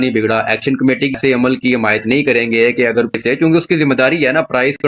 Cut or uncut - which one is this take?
cut